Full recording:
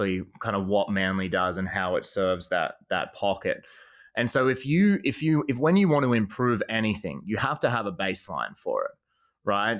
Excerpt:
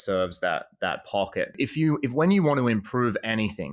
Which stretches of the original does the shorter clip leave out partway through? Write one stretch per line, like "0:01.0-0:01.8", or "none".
0:03.6-0:05.0